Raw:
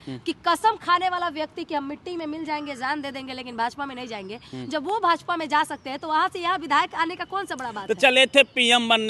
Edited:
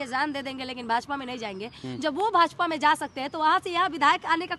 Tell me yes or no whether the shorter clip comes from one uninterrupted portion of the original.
yes